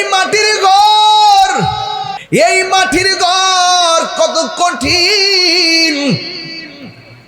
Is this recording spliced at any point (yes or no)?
yes